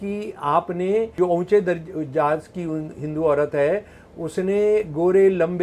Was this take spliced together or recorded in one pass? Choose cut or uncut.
cut